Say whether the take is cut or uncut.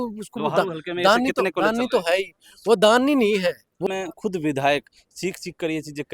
cut